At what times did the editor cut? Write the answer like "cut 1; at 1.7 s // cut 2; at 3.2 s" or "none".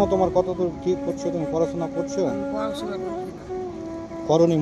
none